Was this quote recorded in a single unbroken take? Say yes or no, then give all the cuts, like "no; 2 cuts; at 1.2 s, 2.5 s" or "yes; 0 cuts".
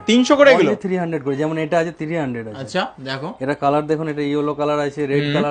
yes; 0 cuts